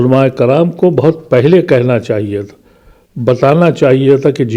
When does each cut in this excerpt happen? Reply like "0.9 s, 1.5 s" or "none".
none